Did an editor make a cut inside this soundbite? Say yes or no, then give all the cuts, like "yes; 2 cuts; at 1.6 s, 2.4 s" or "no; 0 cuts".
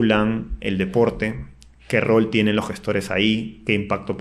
no; 0 cuts